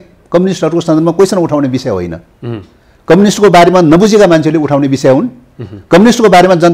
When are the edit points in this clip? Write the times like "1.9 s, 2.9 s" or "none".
none